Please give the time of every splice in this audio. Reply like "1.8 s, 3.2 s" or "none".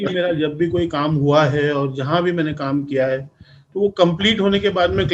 none